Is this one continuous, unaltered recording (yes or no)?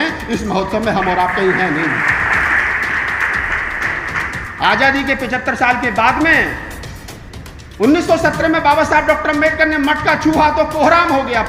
no